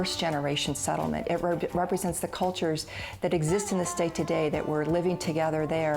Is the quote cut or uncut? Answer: uncut